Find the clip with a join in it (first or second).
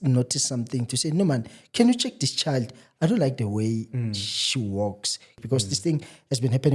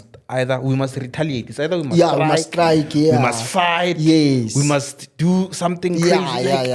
first